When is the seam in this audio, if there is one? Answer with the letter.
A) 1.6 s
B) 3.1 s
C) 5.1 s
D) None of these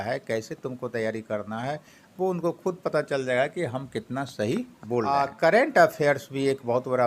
C